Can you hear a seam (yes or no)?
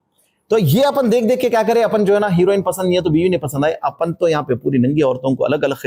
no